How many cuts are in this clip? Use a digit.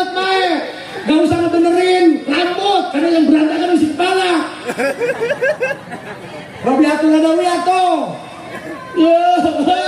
0